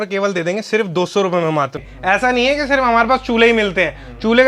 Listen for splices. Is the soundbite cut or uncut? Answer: cut